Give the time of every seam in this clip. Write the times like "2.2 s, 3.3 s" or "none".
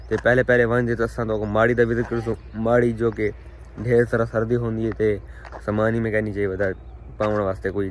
none